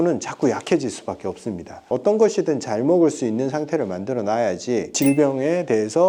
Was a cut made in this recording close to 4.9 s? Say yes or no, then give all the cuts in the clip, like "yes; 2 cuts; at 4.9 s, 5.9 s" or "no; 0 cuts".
yes; 2 cuts; at 1.9 s, 4.9 s